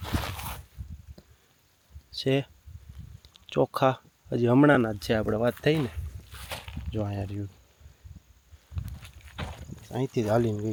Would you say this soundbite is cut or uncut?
uncut